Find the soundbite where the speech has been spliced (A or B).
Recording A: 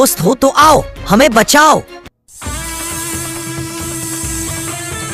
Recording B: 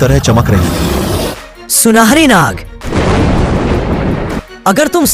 B